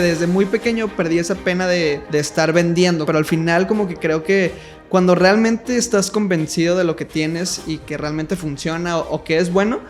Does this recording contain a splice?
yes; 2 cuts; at 2.0 s, 3.1 s

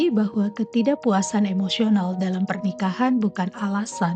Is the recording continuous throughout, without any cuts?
yes; 0 cuts

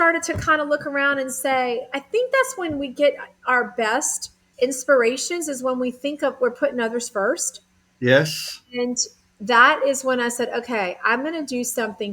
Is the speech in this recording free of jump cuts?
yes; 0 cuts

